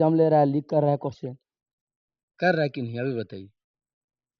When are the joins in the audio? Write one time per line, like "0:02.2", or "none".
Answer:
none